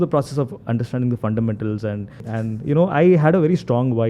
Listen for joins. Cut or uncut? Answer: cut